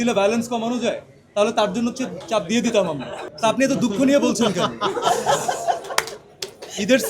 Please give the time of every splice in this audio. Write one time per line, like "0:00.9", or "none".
0:03.2